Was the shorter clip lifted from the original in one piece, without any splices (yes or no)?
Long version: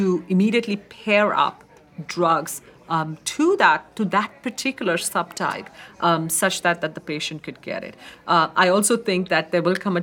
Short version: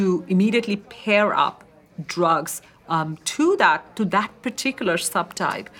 yes